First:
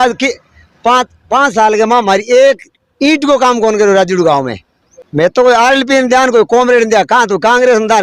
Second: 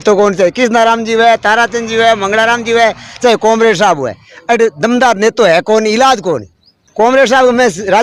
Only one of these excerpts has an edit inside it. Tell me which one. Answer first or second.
first